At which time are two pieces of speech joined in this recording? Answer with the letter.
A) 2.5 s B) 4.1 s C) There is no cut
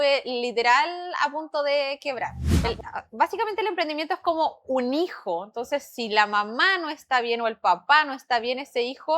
A